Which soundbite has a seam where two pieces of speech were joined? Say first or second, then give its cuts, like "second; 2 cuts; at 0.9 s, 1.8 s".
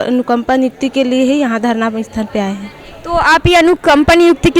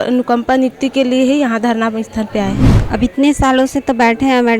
second; 1 cut; at 2.7 s